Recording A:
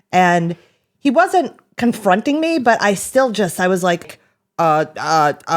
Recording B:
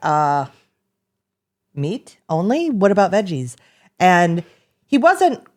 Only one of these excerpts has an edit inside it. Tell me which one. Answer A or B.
A